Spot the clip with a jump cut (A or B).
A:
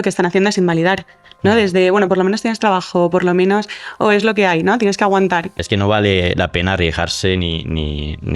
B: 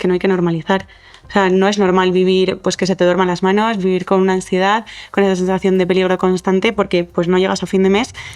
A